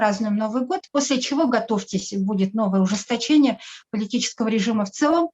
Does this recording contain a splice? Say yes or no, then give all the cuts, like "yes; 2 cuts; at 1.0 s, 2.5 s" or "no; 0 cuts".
no; 0 cuts